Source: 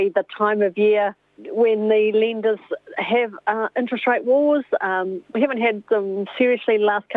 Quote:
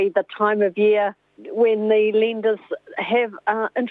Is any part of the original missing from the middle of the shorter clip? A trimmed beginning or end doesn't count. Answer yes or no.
no